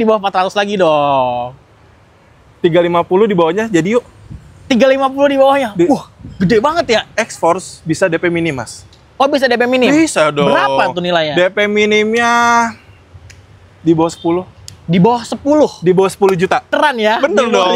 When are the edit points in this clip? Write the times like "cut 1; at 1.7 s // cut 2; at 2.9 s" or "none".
cut 1; at 7.1 s // cut 2; at 16.7 s